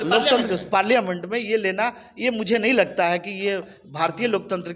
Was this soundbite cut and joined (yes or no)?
no